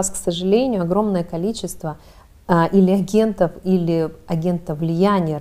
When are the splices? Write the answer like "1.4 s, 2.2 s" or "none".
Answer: none